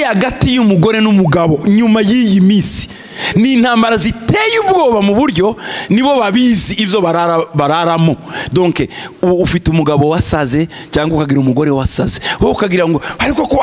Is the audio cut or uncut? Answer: uncut